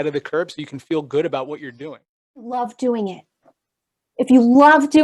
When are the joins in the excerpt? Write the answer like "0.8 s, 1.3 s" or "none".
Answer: 2.5 s